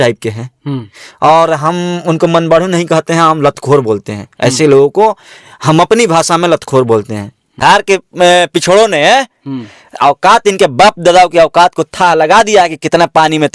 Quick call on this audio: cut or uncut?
cut